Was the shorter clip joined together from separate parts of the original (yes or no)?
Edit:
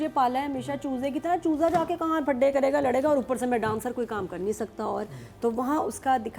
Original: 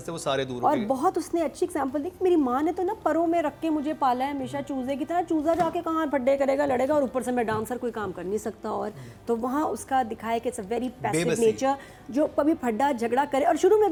no